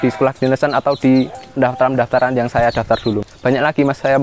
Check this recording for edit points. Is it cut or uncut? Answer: cut